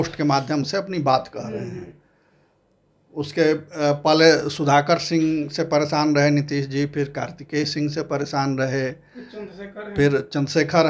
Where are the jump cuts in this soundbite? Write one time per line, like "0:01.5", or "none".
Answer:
none